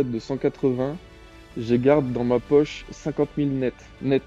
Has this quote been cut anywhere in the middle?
no; 0 cuts

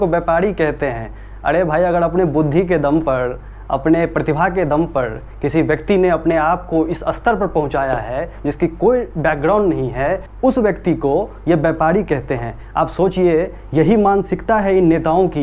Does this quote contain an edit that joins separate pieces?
no; 0 cuts

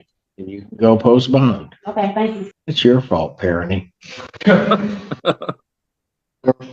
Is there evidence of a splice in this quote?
no; 0 cuts

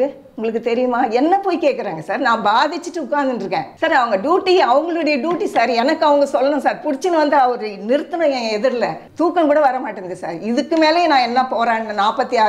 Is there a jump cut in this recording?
yes; 2 cuts; at 3.7 s, 9.1 s

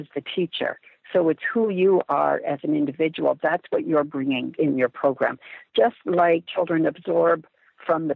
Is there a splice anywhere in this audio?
yes; 2 cuts; at 4.5 s, 6.5 s

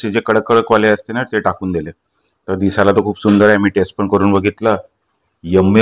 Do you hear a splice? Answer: no; 0 cuts

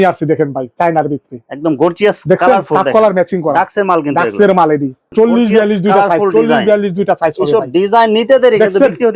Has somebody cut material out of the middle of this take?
yes; 1 cut; at 5.0 s

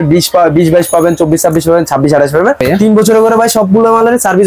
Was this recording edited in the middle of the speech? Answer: yes; 1 cut; at 2.6 s

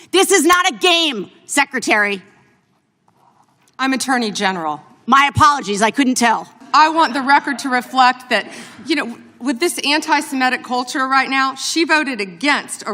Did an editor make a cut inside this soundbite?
yes; 1 cut; at 6.6 s

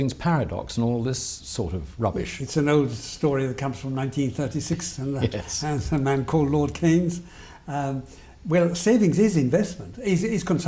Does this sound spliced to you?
no; 0 cuts

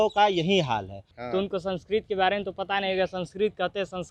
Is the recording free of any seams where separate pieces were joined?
no; 1 cut; at 1.2 s

